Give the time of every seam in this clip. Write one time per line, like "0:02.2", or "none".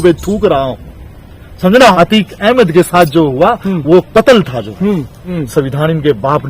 0:01.8
0:05.2